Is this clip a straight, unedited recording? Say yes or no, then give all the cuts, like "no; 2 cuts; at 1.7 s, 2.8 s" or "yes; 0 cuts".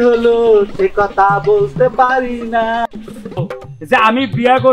no; 1 cut; at 3.4 s